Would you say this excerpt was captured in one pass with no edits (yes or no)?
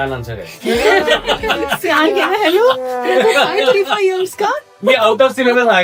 yes